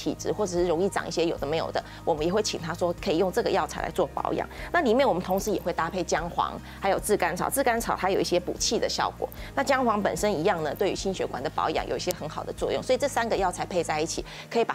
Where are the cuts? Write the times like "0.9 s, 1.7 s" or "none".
none